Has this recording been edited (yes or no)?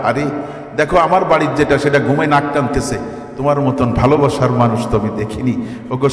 no